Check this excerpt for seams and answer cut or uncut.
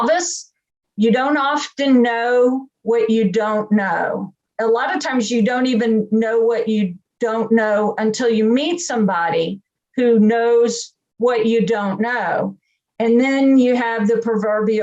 uncut